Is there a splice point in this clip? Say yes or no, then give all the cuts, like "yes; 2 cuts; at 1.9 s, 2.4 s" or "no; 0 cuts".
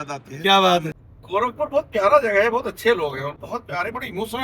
yes; 2 cuts; at 0.9 s, 3.3 s